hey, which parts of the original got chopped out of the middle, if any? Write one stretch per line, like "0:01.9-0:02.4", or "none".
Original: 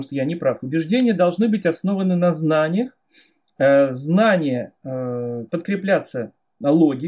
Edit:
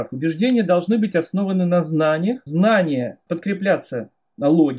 0:03.0-0:04.0
0:04.7-0:05.4